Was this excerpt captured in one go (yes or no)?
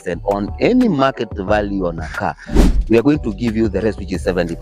no